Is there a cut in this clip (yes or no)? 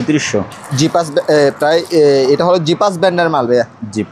no